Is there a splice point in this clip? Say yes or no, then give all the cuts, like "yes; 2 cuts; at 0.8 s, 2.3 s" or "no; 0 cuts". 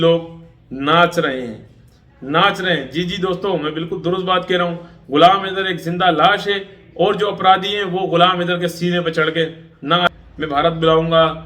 yes; 1 cut; at 10.1 s